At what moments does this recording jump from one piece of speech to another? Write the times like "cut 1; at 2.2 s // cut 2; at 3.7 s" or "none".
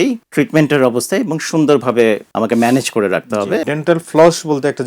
cut 1; at 2.3 s // cut 2; at 3.6 s

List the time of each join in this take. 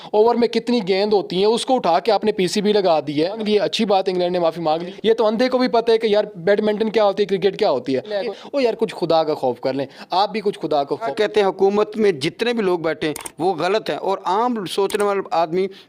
cut 1; at 3.4 s // cut 2; at 4.9 s // cut 3; at 8.2 s // cut 4; at 11.1 s

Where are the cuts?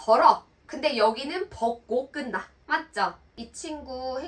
cut 1; at 3.3 s

